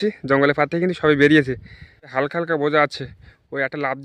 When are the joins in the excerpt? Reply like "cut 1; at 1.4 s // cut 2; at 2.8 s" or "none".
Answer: cut 1; at 2.1 s